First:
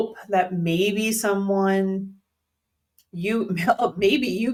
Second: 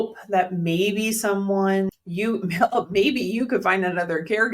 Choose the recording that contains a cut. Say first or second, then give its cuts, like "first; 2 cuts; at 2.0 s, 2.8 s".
second; 1 cut; at 1.9 s